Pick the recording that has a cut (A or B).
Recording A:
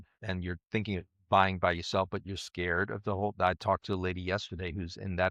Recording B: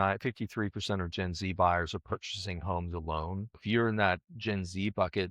B